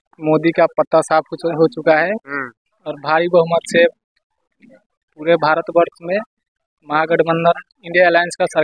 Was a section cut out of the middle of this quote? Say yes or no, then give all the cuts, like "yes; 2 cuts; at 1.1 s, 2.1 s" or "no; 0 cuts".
no; 0 cuts